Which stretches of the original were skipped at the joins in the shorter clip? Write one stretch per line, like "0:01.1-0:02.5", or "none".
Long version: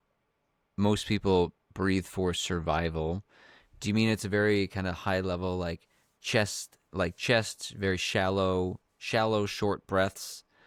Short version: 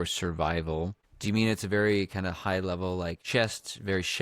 0:03.3-0:03.7
0:05.8-0:07.2